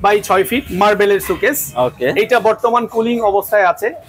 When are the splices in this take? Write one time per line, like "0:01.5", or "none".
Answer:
none